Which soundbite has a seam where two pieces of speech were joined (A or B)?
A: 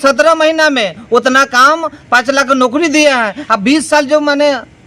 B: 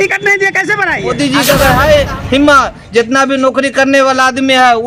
B